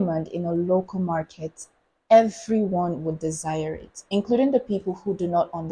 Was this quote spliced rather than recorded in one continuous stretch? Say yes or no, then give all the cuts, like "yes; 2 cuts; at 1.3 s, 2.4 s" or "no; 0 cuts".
no; 0 cuts